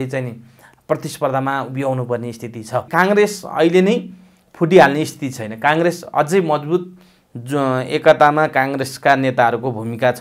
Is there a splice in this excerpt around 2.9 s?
yes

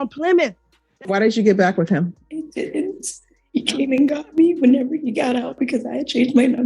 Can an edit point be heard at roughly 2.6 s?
no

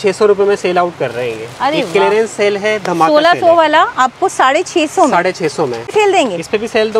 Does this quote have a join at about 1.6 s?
no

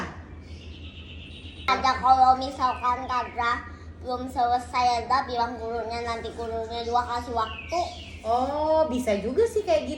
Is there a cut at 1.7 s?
yes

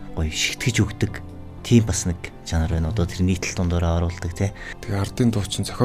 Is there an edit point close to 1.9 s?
no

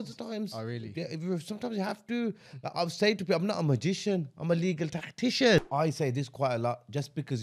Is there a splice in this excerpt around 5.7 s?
yes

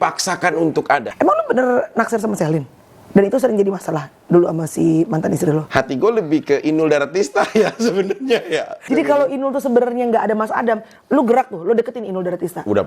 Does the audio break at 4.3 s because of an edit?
no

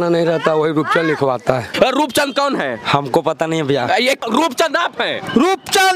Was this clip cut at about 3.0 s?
no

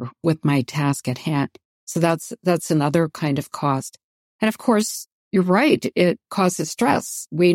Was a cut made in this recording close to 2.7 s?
no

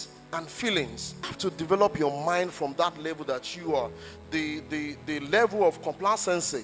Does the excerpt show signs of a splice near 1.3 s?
yes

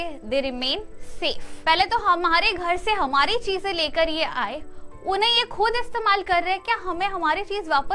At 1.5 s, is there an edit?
yes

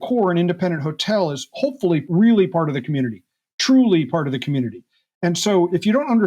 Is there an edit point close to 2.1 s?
yes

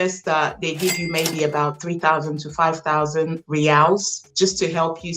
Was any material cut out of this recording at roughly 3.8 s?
no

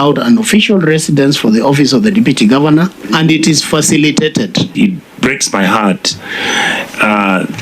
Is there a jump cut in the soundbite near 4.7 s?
yes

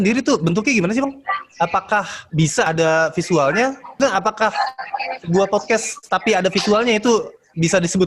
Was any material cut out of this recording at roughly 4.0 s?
yes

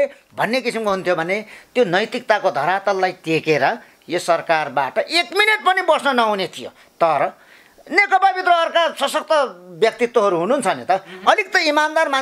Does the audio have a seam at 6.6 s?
no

